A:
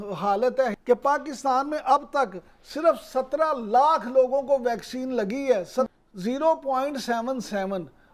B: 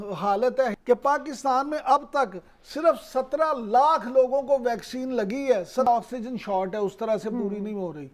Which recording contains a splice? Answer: B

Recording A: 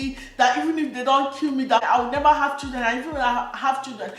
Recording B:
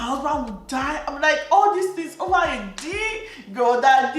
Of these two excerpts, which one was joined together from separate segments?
A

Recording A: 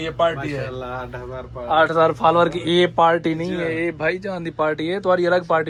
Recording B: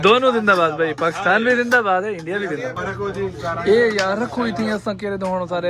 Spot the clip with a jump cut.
B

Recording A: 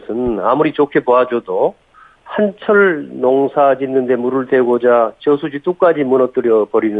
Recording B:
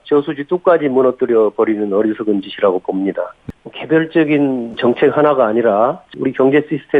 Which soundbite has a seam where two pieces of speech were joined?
B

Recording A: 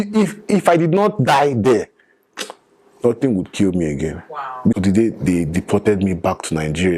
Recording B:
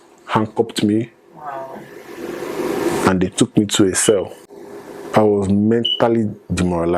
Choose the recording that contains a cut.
A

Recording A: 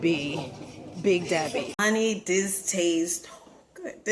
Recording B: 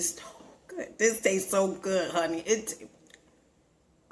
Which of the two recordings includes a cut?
A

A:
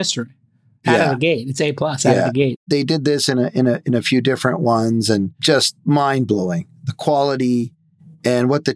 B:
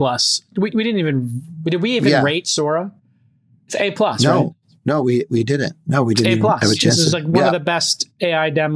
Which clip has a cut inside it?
A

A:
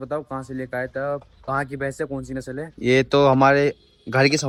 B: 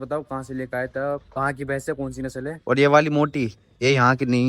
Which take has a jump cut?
B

